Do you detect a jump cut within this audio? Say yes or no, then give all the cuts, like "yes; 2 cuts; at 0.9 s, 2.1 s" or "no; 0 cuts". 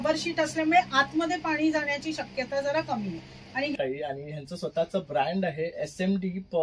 yes; 1 cut; at 3.8 s